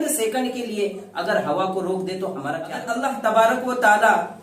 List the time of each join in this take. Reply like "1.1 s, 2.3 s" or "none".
2.9 s